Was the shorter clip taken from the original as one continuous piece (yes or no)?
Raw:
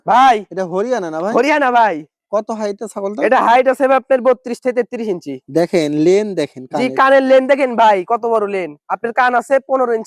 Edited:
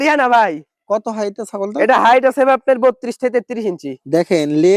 yes